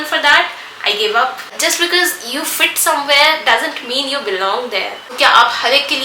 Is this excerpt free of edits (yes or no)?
no